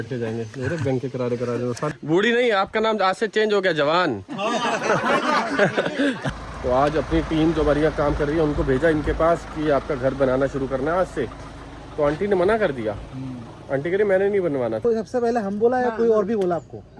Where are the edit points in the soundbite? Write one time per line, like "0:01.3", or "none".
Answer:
0:01.9
0:06.3
0:14.8